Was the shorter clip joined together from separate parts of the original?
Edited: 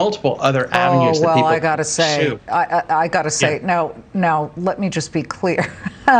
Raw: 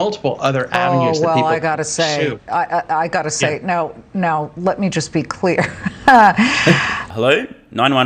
no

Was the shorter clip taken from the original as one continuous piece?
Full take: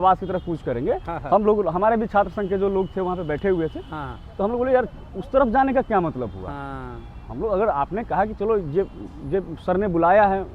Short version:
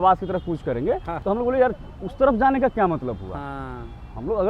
no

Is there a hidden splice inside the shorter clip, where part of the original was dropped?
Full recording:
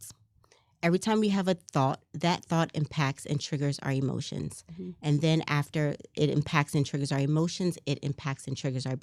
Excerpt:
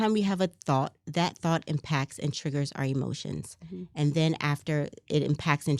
no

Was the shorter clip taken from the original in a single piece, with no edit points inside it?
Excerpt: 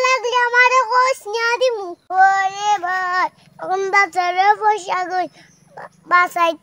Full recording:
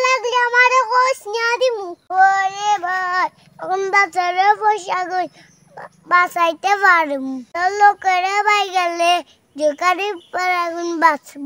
yes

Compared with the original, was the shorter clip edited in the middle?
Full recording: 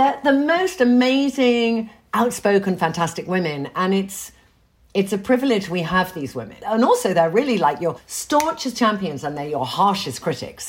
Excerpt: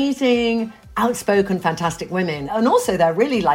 yes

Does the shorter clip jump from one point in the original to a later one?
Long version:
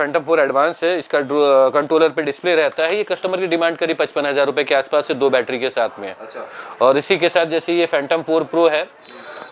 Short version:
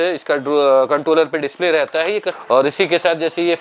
yes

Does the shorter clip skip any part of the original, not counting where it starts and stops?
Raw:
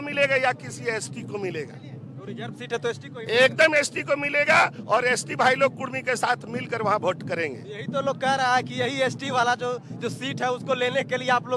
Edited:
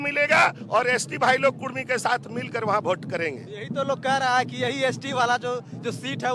no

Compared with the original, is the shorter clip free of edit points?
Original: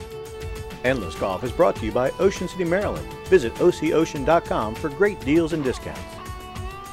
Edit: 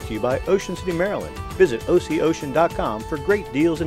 yes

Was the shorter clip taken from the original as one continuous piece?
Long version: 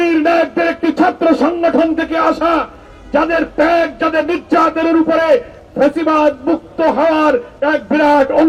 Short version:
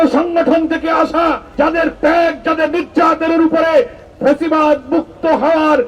no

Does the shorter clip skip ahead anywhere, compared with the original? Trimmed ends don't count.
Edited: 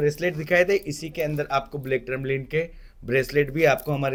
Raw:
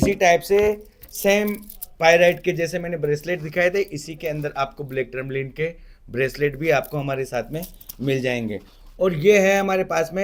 no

